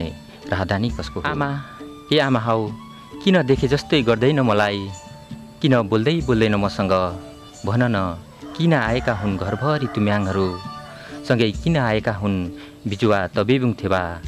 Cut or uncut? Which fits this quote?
cut